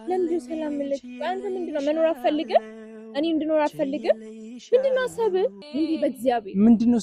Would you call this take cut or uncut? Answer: cut